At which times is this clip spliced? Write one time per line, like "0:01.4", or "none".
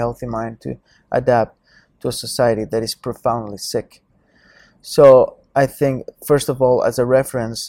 none